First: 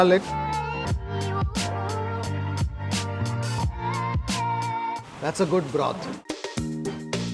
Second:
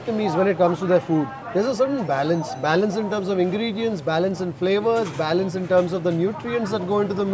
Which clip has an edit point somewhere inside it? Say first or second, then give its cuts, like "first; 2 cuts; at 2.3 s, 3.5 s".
first; 1 cut; at 6.2 s